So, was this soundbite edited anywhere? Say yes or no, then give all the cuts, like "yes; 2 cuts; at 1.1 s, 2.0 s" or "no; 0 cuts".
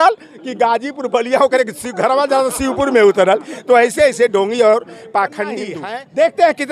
yes; 1 cut; at 5.7 s